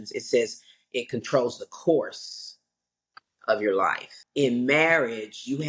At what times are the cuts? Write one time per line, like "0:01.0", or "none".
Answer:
0:04.2

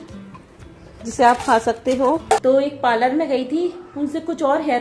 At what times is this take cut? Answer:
0:02.4

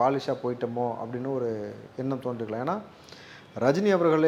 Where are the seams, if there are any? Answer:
none

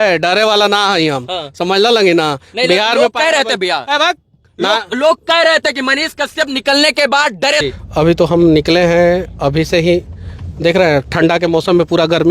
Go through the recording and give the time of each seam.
0:07.6

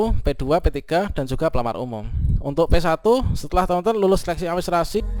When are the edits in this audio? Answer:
none

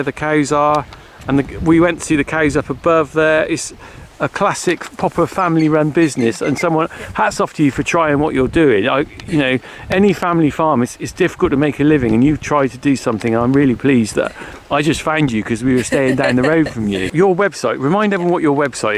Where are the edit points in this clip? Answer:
0:17.1

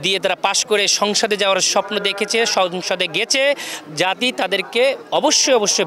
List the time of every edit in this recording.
none

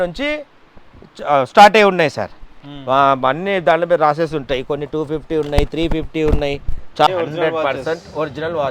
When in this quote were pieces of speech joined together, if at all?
0:07.1

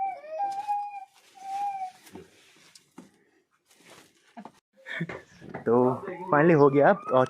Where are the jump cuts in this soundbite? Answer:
0:04.5

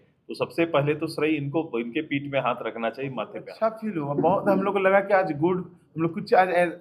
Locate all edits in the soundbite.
0:03.4

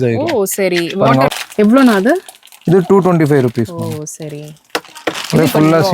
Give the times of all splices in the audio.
0:01.3

